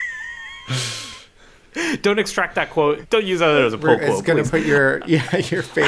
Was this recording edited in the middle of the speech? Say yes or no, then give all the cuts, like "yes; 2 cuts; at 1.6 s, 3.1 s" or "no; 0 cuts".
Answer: yes; 1 cut; at 3.0 s